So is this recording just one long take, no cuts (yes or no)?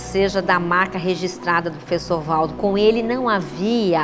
yes